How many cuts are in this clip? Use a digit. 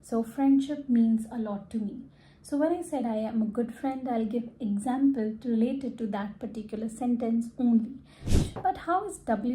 1